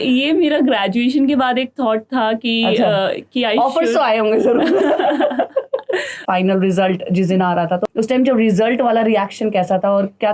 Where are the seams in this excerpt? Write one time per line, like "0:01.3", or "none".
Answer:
0:06.2
0:07.8